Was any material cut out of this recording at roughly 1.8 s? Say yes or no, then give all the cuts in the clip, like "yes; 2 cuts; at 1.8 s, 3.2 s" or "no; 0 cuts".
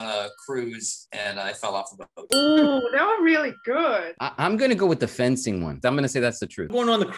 no; 0 cuts